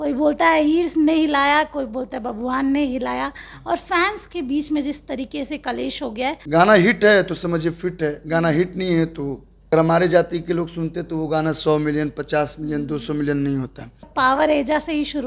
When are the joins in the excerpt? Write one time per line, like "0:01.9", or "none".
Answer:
0:06.4
0:09.5
0:14.1